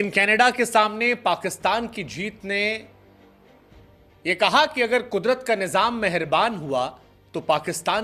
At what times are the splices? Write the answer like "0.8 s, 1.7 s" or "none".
none